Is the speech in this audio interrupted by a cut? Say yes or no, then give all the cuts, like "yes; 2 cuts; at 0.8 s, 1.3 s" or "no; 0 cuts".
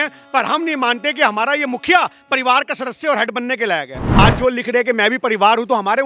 yes; 1 cut; at 4.0 s